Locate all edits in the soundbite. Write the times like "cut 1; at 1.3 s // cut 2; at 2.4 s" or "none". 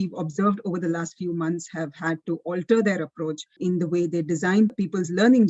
cut 1; at 3.6 s // cut 2; at 4.7 s